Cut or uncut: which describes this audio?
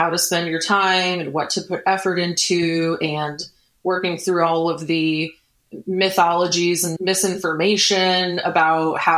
cut